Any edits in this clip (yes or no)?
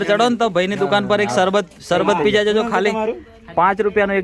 no